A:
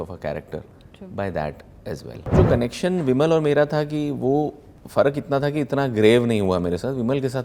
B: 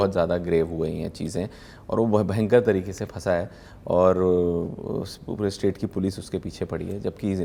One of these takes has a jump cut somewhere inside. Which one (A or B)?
A